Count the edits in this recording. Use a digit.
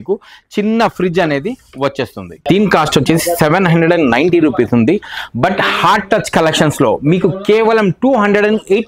1